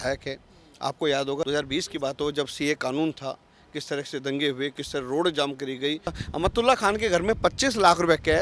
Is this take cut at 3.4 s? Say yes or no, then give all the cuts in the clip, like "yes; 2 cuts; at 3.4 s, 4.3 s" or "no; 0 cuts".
no; 1 cut; at 6.2 s